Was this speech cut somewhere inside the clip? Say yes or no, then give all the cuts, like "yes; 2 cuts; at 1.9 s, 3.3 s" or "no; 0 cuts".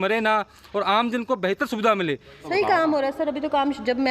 yes; 1 cut; at 2.4 s